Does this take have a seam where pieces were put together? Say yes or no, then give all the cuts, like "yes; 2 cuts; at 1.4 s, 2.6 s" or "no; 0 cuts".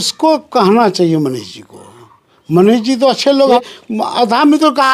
yes; 1 cut; at 3.6 s